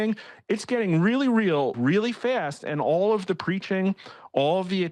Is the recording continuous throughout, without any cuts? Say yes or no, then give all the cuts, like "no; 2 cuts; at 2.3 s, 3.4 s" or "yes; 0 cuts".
no; 1 cut; at 1.8 s